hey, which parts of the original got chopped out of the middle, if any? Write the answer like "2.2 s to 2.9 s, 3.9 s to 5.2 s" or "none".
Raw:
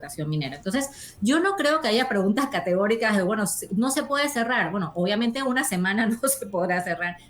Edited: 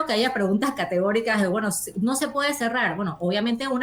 none